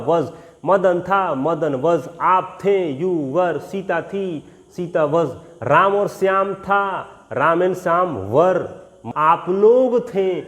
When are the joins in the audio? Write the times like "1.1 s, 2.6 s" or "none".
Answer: 9.0 s